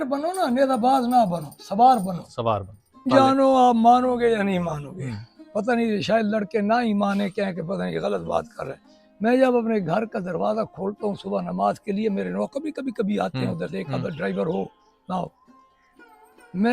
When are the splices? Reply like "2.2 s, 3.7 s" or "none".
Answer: 3.1 s